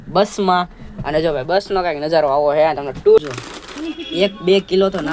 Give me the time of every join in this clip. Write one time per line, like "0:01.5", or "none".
0:03.2